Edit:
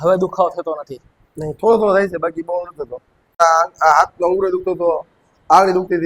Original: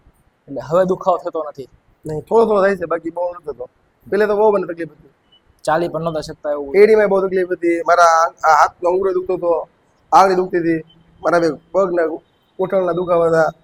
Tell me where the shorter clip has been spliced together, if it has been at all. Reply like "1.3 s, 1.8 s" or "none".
3.4 s